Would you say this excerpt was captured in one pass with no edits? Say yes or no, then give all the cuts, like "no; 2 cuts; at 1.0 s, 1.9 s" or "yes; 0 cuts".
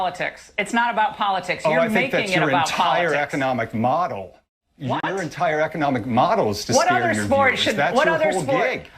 no; 1 cut; at 5.0 s